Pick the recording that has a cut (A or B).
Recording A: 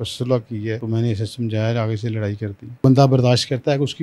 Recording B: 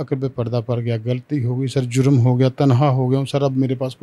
A